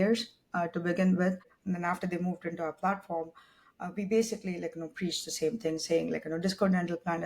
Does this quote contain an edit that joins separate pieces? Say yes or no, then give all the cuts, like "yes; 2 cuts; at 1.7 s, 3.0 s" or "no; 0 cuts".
yes; 1 cut; at 1.5 s